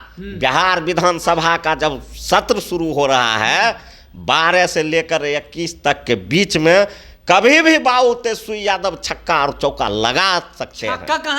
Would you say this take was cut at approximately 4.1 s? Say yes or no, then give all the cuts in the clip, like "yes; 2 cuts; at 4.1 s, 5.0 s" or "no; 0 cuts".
no; 0 cuts